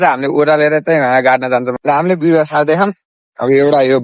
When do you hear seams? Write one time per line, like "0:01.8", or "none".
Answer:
none